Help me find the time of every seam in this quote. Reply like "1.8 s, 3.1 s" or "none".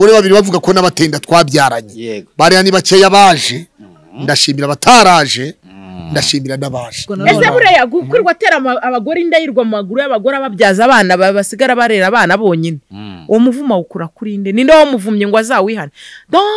7.0 s